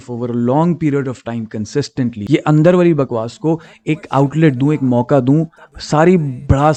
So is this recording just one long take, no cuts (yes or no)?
yes